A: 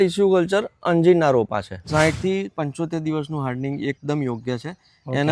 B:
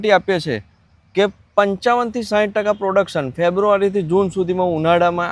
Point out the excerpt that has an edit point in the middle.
A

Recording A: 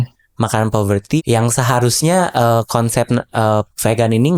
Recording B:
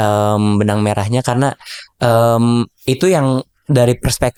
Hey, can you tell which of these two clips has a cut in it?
A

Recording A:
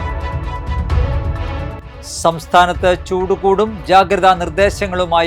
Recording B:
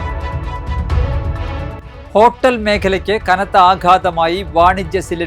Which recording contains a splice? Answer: A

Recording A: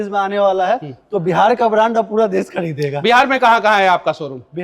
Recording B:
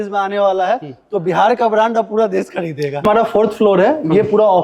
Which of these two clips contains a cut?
A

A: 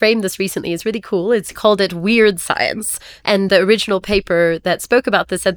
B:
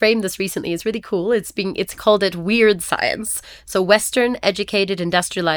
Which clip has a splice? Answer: A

